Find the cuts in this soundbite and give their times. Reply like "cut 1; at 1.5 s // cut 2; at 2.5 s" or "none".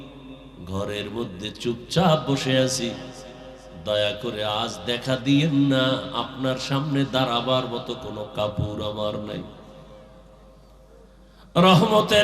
none